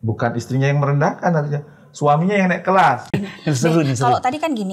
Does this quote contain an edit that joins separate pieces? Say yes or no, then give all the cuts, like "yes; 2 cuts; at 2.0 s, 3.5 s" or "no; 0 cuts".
yes; 1 cut; at 3.1 s